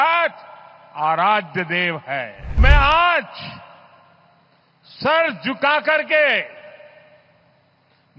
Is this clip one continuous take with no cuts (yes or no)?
no